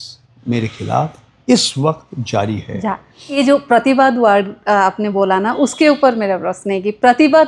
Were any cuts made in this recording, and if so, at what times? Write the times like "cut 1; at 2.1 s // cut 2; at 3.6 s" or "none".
cut 1; at 3.4 s